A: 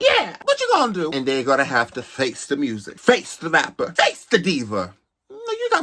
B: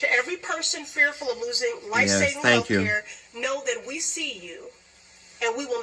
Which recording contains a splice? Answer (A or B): A